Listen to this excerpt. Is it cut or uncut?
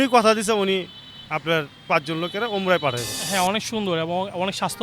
cut